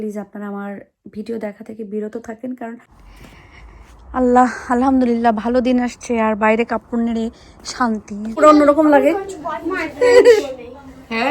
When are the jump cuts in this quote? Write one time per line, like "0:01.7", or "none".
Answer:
0:03.1
0:08.4